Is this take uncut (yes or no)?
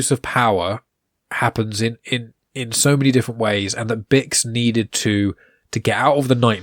yes